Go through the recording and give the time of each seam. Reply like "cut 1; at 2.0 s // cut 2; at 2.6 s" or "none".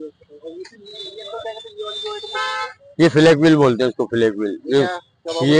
none

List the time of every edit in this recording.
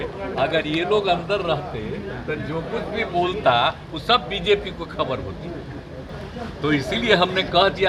cut 1; at 6.0 s

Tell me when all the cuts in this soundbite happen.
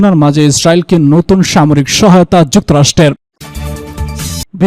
cut 1; at 3.3 s

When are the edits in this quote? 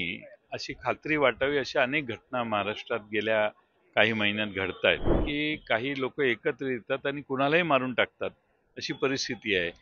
cut 1; at 5.2 s

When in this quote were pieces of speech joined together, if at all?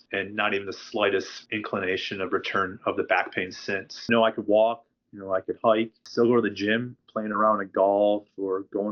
cut 1; at 4.1 s // cut 2; at 7.0 s

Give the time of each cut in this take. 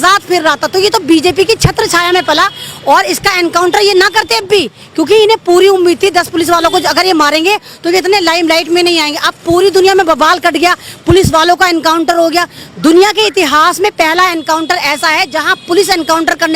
none

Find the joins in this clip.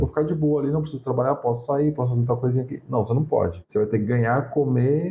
none

